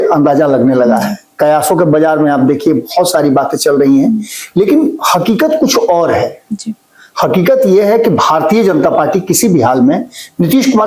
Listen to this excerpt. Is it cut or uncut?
uncut